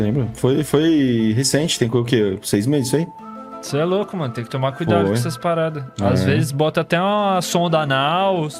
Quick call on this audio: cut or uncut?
uncut